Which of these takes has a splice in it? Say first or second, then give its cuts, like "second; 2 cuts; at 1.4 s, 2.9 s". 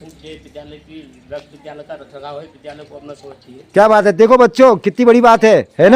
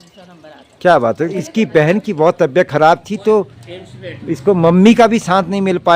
second; 1 cut; at 1.4 s